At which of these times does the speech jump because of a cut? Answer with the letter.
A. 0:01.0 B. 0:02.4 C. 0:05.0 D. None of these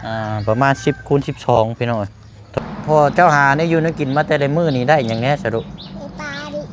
B